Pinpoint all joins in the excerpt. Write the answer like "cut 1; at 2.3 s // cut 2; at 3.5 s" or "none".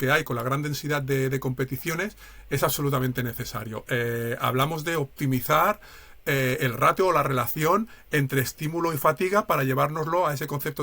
none